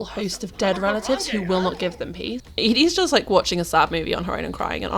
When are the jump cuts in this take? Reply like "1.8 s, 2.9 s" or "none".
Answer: 2.4 s